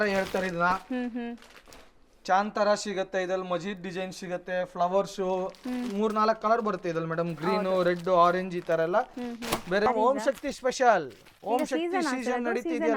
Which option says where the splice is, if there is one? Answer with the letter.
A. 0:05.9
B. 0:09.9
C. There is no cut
B